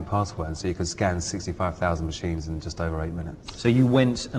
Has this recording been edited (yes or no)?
yes